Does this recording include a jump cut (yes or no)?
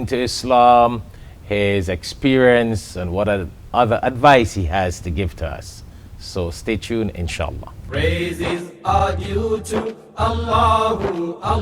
yes